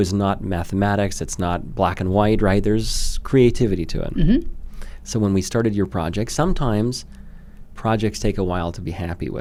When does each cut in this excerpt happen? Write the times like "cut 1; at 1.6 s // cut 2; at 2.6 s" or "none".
none